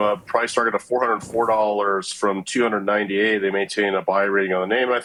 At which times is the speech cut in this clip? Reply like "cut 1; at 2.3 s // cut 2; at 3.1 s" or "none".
none